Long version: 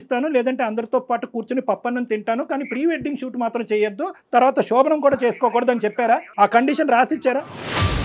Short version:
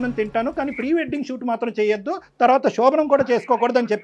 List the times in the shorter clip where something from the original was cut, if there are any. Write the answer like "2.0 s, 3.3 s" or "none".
none